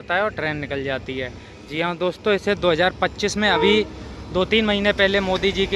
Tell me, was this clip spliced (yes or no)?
no